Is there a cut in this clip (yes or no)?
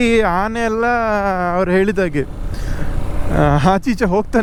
no